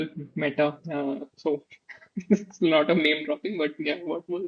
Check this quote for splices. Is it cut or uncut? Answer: uncut